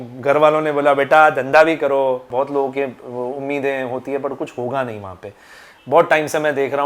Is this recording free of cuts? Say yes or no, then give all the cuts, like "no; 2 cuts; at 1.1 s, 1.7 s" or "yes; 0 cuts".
no; 1 cut; at 2.3 s